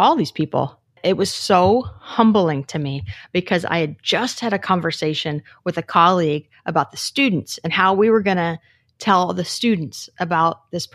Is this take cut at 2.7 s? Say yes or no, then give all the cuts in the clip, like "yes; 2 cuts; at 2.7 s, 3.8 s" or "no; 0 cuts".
no; 1 cut; at 1.0 s